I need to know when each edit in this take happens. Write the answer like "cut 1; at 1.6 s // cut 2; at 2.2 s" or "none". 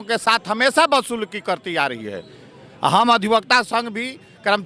none